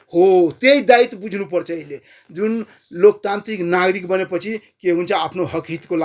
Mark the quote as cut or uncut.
uncut